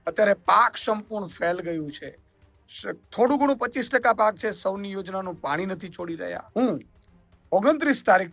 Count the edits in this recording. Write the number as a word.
one